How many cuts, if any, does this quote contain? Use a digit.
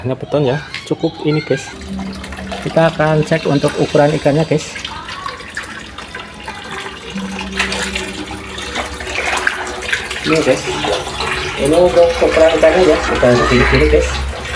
1